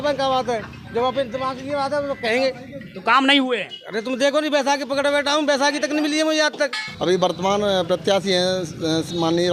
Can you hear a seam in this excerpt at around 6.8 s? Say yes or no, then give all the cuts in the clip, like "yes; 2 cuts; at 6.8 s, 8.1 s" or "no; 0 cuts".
yes; 1 cut; at 6.8 s